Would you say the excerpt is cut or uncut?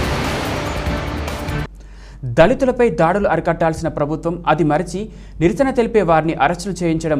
cut